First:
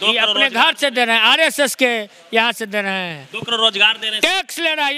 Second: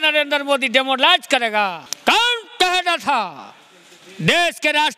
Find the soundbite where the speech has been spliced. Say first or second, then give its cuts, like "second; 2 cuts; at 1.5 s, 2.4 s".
second; 1 cut; at 1.9 s